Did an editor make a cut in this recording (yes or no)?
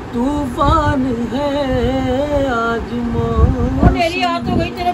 yes